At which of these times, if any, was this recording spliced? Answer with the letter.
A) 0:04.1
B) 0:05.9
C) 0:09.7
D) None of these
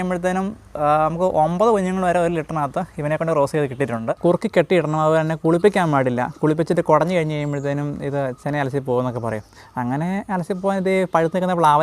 A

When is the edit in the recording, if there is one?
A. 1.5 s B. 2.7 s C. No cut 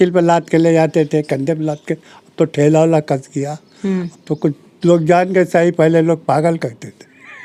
C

